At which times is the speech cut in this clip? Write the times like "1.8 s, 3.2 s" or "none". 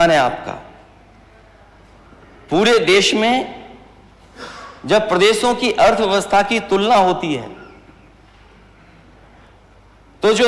none

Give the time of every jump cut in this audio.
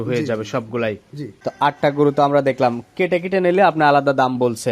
1.5 s

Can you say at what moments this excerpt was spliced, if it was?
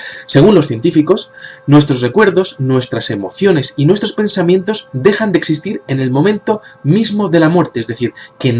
2.0 s

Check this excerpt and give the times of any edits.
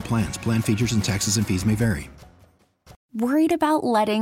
3.0 s

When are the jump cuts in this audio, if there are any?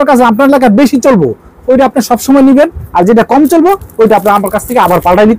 none

